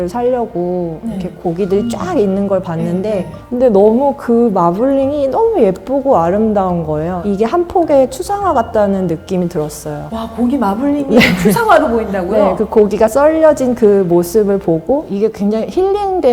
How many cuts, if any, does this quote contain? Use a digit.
3